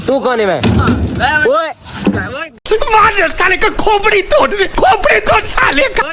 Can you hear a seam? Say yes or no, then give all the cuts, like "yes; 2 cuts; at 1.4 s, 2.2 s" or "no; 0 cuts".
no; 0 cuts